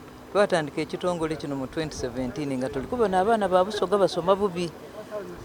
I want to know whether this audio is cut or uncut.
uncut